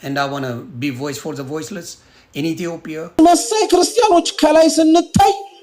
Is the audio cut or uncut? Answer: cut